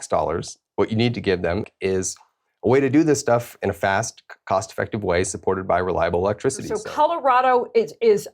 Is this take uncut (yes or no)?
no